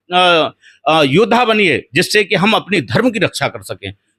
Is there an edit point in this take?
no; 0 cuts

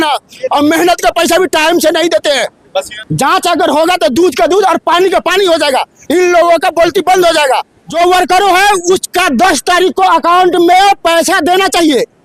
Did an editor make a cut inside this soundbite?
yes; 2 cuts; at 3.0 s, 7.8 s

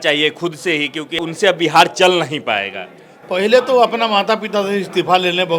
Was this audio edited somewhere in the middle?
yes; 1 cut; at 1.2 s

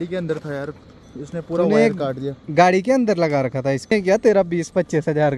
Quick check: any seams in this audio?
yes; 1 cut; at 3.9 s

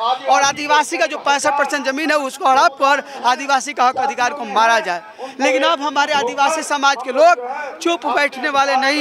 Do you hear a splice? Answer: no; 0 cuts

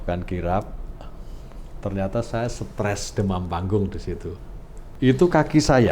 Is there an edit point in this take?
yes; 1 cut; at 4.8 s

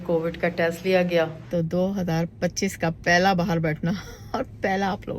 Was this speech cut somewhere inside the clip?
yes; 1 cut; at 1.4 s

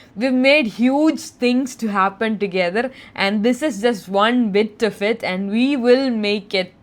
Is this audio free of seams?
yes; 0 cuts

